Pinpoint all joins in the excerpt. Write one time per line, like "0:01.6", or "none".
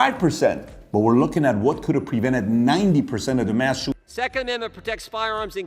0:04.0